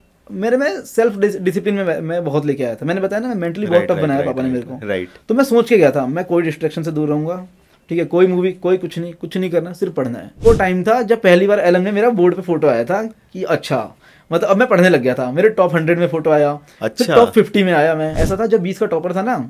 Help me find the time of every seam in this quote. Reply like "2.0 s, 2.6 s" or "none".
10.4 s, 18.2 s